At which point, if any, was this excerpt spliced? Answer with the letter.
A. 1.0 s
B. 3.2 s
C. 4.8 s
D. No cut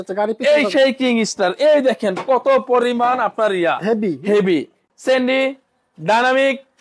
C